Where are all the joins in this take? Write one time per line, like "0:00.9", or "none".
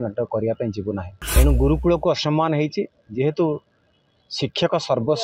0:01.2